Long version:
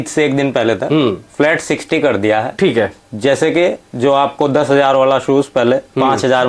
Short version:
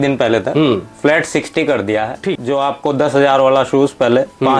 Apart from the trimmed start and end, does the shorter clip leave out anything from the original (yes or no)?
yes